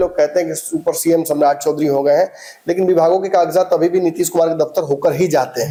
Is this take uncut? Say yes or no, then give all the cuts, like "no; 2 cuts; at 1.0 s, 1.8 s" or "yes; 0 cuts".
yes; 0 cuts